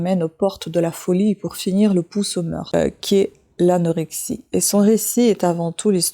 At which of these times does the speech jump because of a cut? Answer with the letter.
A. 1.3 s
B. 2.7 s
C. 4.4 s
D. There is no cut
B